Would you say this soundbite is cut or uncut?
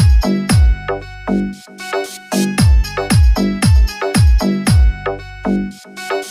uncut